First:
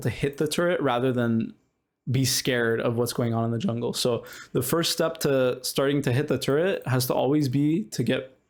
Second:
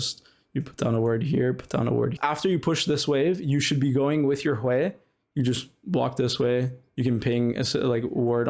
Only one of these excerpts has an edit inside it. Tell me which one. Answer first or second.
second